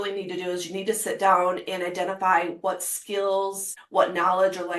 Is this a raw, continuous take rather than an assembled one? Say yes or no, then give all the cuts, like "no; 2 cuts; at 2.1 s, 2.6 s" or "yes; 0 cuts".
no; 1 cut; at 3.7 s